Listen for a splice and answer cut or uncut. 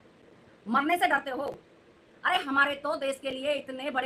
uncut